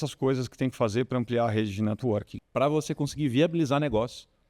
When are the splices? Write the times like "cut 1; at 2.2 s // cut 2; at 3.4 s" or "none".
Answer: cut 1; at 2.4 s